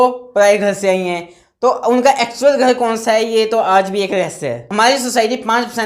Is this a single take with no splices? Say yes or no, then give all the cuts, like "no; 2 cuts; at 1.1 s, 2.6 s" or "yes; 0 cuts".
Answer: no; 1 cut; at 4.6 s